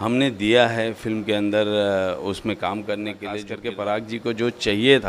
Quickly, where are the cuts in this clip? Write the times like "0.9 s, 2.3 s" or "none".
3.5 s